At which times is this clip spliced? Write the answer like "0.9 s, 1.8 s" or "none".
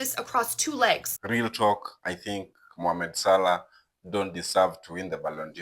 1.1 s